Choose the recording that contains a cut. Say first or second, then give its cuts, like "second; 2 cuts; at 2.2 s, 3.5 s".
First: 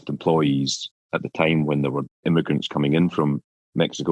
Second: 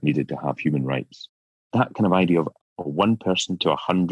first; 1 cut; at 2.1 s